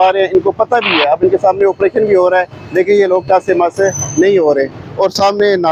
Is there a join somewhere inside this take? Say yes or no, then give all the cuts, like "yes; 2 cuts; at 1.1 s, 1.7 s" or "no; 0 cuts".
no; 0 cuts